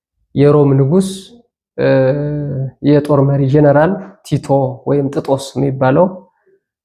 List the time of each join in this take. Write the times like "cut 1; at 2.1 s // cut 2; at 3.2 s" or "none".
none